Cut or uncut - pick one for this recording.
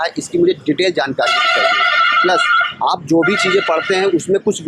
uncut